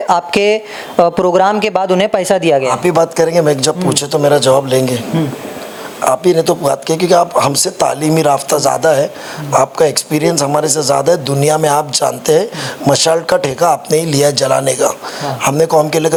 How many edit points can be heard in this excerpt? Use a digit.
0